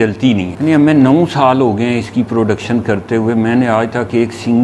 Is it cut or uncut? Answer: uncut